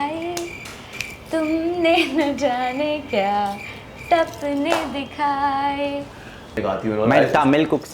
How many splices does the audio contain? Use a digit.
1